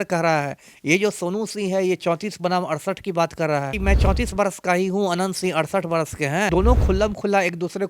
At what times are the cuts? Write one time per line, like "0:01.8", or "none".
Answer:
0:03.7
0:06.5

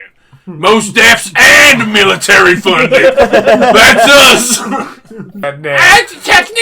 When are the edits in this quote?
0:05.4

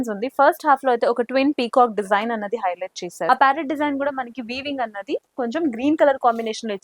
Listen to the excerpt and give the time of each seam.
0:03.3

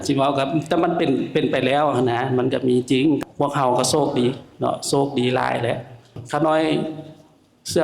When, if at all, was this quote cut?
0:03.2
0:06.2

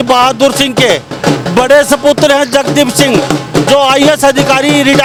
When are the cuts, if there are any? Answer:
none

